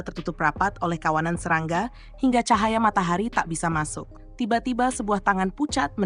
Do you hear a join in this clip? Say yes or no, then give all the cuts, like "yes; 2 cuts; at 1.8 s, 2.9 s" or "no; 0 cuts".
yes; 1 cut; at 4.2 s